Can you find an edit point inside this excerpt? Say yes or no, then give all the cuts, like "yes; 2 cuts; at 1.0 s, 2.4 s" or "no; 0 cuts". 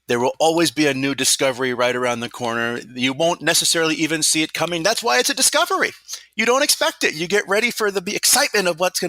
no; 0 cuts